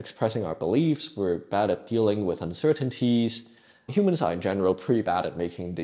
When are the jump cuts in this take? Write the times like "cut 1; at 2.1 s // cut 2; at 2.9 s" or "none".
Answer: cut 1; at 3.8 s